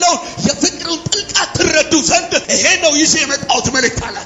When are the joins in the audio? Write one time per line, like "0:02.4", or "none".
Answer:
0:02.5